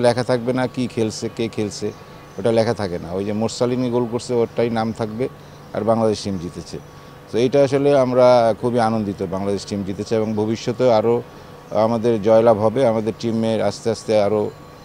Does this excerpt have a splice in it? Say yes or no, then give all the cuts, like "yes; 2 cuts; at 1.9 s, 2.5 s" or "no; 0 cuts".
no; 0 cuts